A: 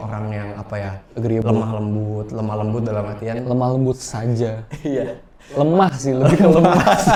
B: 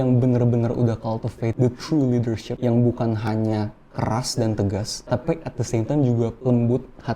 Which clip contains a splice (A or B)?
B